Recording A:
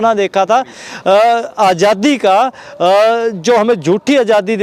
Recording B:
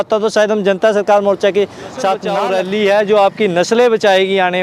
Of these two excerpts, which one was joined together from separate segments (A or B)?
B